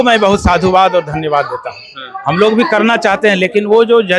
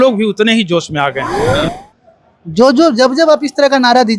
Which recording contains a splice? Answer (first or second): second